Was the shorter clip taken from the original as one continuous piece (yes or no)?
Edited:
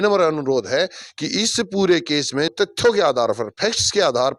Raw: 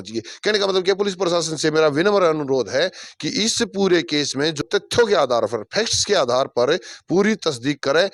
no